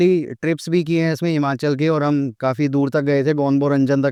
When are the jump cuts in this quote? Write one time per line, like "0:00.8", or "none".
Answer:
none